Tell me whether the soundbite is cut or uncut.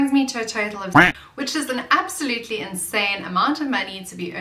cut